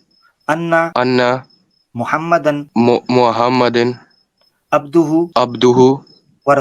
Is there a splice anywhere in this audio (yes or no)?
yes